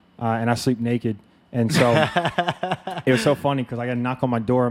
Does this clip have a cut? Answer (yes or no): no